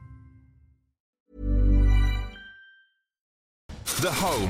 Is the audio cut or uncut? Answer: cut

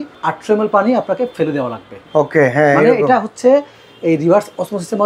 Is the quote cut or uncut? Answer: uncut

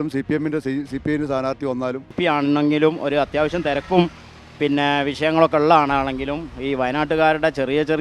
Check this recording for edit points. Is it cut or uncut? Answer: cut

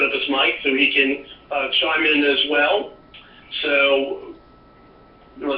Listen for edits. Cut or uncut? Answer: uncut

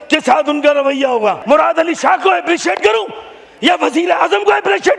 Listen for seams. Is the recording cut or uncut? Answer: cut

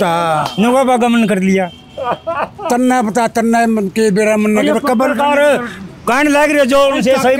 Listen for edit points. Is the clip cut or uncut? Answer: uncut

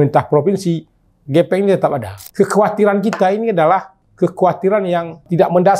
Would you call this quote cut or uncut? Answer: cut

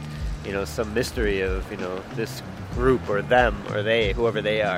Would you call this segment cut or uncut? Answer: uncut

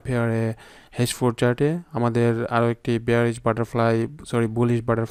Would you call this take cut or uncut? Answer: uncut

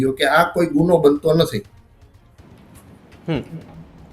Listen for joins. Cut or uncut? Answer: uncut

